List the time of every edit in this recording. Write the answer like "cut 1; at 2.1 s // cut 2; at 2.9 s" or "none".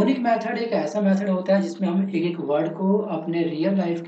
cut 1; at 1.2 s